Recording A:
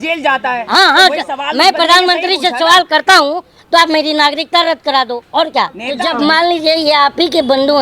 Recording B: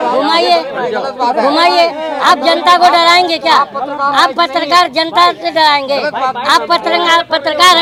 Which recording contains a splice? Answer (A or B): A